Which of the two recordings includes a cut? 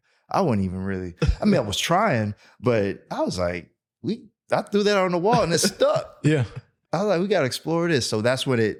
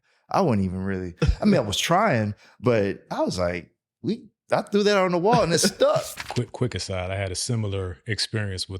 second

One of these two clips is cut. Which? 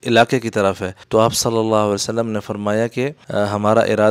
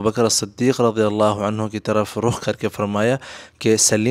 first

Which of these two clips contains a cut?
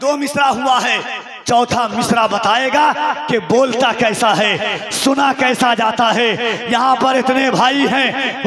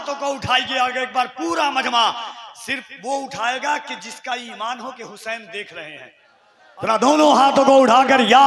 second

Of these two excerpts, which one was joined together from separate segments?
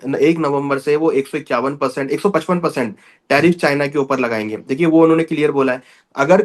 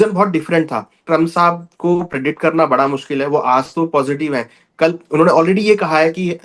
second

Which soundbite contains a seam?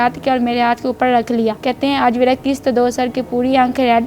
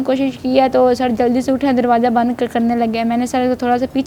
first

